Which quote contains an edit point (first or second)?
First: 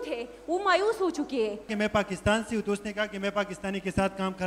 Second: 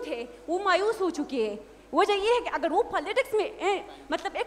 first